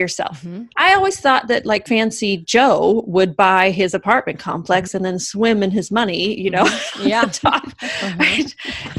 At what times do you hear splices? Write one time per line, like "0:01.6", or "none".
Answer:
0:01.8